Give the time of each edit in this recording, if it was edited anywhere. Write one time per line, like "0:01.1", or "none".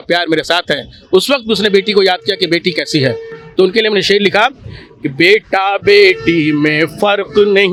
none